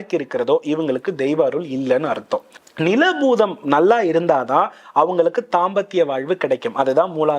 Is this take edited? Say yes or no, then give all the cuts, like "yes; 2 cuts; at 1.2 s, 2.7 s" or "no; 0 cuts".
yes; 1 cut; at 2.6 s